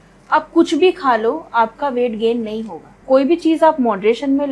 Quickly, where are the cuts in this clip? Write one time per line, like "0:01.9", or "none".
0:03.0